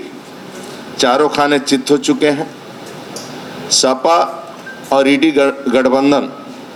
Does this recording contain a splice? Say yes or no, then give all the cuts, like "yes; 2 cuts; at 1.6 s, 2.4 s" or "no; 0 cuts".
no; 0 cuts